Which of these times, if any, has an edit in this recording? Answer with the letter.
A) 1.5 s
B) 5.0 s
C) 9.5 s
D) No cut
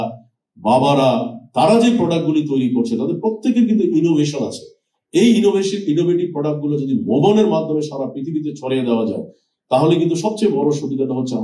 D